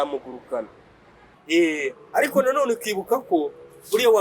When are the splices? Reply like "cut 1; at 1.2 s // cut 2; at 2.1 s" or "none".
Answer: cut 1; at 1.4 s